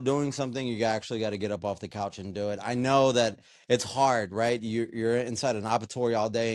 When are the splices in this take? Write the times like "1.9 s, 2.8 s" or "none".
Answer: none

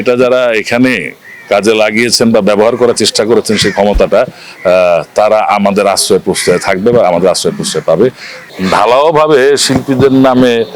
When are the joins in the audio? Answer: 8.4 s

